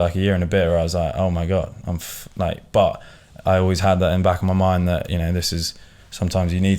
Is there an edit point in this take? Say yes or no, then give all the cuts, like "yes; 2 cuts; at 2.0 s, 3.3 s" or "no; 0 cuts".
no; 0 cuts